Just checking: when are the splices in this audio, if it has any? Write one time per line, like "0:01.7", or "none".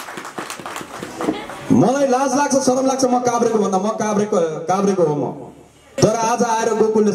0:05.9